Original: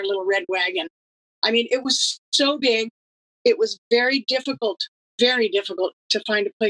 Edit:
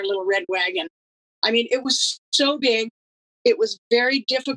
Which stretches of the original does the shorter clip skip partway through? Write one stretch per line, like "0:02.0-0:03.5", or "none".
none